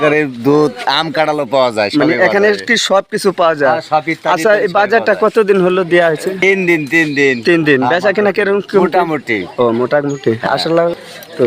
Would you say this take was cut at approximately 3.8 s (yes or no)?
no